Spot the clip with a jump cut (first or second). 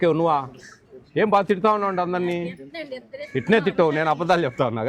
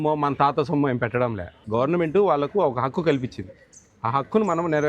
second